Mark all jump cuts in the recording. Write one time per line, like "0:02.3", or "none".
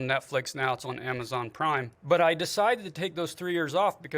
0:01.9

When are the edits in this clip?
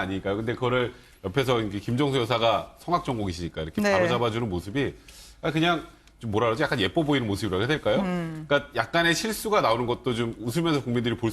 0:08.4

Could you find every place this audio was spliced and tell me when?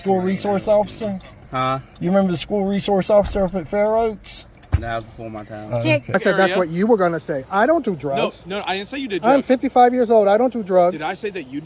0:06.1

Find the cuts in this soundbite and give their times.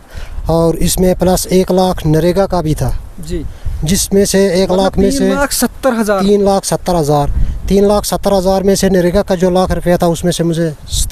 none

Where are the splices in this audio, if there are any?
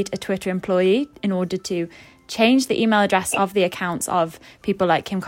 none

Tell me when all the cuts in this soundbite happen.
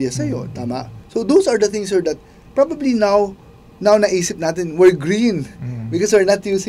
0:01.0

